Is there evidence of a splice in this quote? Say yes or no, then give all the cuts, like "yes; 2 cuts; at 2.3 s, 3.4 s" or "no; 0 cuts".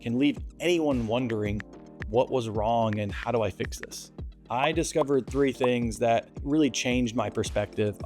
yes; 1 cut; at 4.1 s